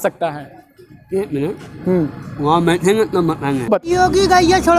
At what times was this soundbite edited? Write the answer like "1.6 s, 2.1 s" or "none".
3.8 s